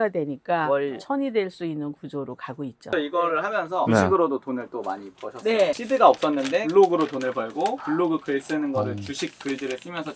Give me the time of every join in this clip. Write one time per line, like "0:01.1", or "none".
0:02.9
0:05.7